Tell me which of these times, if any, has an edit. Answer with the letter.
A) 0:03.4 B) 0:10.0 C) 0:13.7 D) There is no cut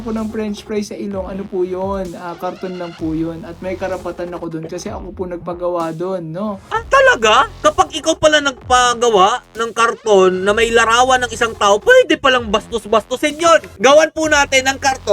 C